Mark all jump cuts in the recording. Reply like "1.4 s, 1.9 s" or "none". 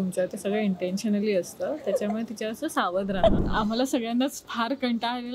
3.4 s, 4.4 s

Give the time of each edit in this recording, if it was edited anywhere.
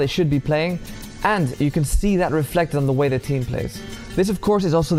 none

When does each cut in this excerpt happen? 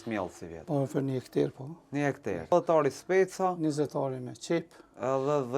2.5 s

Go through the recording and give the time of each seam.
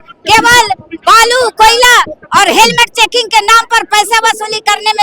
none

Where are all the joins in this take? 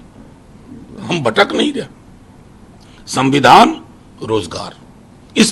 none

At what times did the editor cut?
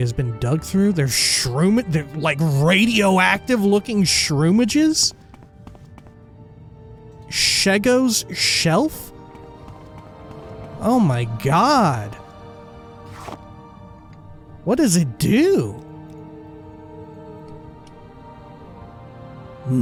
none

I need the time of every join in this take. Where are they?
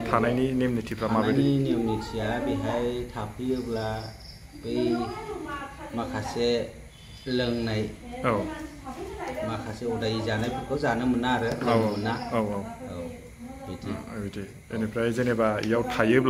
none

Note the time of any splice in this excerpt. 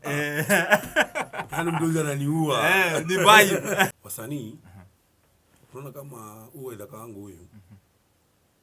3.9 s

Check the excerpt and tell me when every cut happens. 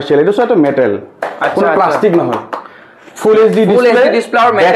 none

